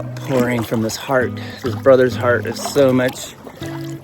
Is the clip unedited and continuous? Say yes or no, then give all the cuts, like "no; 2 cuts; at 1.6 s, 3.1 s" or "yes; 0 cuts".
yes; 0 cuts